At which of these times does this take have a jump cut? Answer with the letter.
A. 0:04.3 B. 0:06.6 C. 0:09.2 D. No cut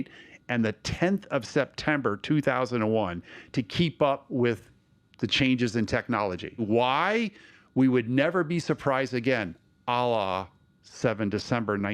B